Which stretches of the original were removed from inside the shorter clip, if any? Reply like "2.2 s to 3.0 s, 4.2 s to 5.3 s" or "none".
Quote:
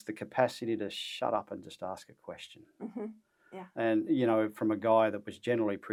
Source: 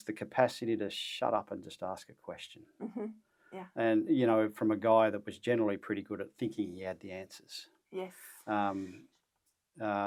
none